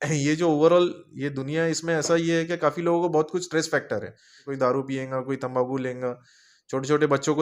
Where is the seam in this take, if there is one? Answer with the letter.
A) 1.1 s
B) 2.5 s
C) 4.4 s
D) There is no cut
C